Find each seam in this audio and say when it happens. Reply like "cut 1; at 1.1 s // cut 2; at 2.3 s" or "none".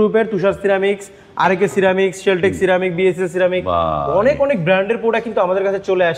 none